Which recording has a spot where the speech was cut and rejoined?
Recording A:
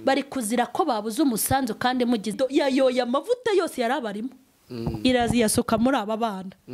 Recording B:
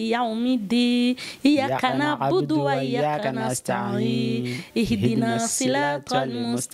A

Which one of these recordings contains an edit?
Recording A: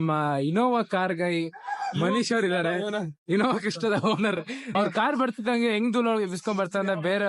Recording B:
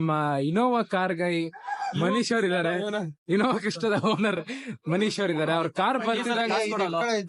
A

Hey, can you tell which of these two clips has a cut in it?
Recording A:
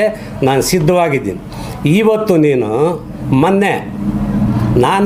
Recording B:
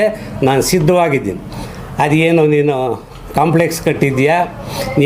B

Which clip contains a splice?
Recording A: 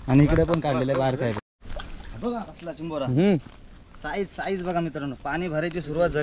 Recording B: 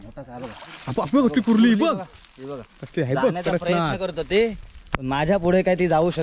A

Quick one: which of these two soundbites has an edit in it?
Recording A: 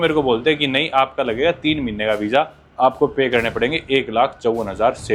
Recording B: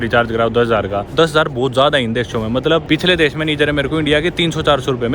B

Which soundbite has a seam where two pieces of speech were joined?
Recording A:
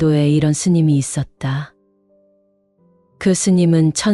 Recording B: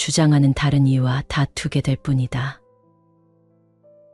B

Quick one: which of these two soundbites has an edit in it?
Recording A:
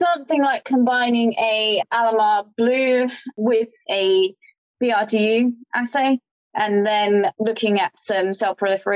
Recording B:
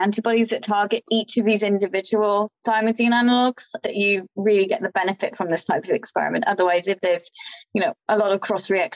A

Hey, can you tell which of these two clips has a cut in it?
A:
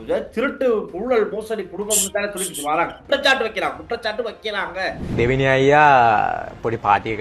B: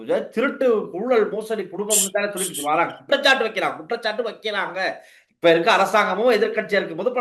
A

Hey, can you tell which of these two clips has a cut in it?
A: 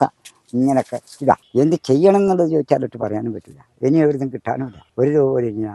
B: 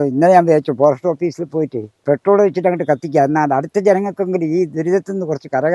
A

